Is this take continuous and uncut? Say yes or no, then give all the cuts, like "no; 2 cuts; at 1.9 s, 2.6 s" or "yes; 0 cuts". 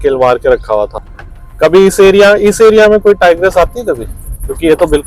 no; 1 cut; at 1.0 s